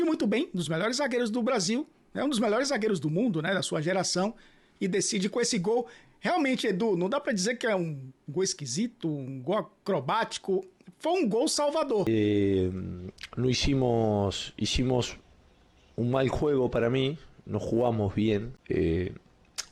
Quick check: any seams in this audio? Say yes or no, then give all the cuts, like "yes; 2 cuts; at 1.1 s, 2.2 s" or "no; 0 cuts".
yes; 2 cuts; at 12.1 s, 18.5 s